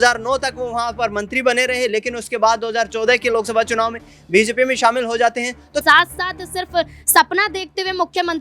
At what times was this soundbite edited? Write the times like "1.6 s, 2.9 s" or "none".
5.8 s